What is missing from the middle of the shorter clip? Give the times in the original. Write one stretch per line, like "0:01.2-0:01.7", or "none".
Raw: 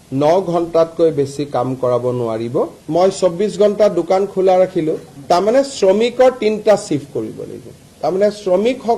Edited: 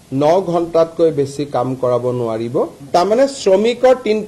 0:02.8-0:05.1